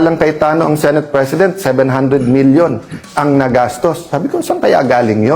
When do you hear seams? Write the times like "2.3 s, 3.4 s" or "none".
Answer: none